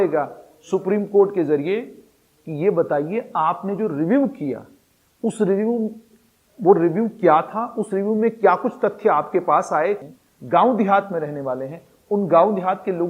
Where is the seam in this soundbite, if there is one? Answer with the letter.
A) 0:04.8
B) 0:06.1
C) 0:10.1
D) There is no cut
C